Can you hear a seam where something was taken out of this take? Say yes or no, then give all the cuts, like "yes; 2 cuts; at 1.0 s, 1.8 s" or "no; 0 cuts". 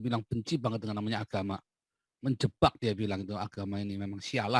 no; 0 cuts